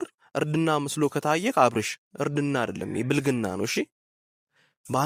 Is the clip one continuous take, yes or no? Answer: yes